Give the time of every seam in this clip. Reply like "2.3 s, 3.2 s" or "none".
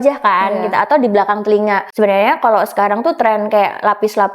1.9 s